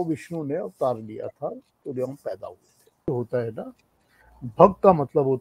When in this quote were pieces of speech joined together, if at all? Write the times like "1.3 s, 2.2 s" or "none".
3.1 s